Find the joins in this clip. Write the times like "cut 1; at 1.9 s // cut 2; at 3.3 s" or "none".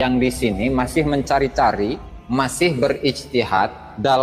cut 1; at 2.1 s